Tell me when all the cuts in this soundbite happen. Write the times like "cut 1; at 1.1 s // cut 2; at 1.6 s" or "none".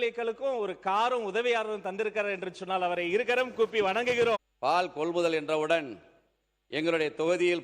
cut 1; at 4.4 s